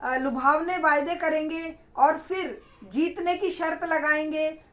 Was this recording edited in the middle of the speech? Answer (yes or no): no